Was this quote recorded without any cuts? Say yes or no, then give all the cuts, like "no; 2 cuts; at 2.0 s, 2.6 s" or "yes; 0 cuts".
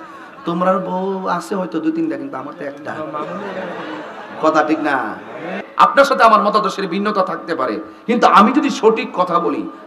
no; 1 cut; at 5.6 s